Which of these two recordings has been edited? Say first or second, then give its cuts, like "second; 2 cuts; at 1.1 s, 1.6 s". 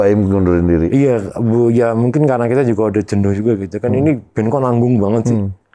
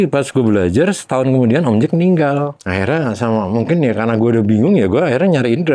second; 1 cut; at 2.6 s